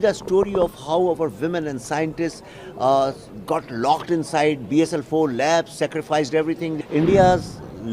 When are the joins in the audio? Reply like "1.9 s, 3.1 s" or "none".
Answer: 6.8 s